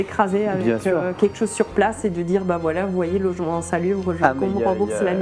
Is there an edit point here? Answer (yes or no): no